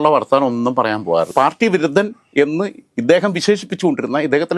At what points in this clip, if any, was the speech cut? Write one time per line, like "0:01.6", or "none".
0:01.3